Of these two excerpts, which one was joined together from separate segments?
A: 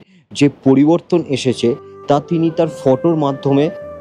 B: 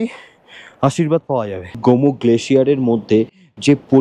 B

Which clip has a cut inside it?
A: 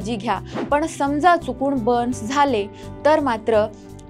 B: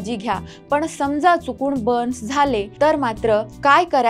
B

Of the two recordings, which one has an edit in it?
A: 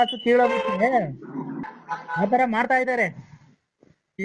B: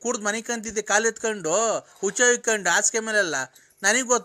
A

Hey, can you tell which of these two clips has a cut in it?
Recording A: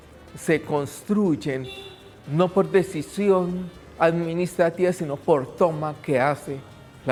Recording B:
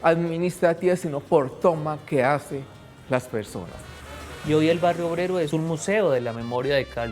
B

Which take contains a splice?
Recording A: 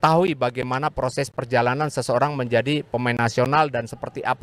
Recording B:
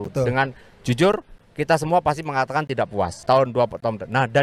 B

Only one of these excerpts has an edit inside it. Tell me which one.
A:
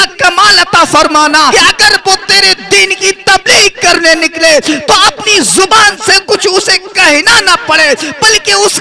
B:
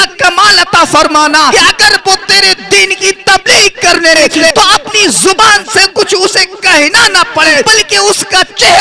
B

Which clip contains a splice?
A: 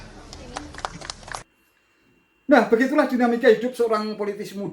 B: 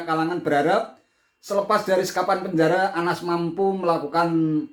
A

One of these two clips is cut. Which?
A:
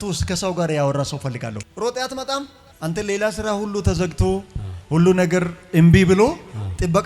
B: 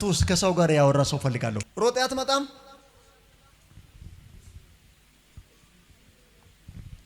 A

